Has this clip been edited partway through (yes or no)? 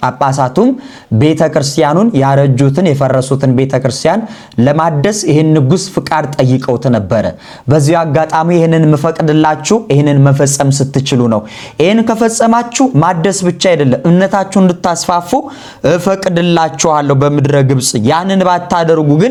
no